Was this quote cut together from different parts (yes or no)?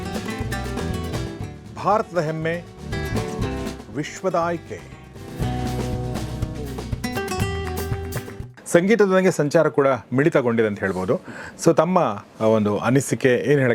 yes